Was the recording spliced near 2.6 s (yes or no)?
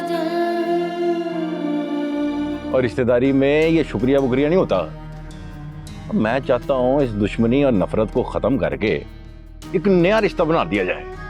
yes